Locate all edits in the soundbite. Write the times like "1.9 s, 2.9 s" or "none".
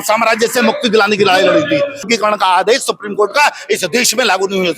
2.1 s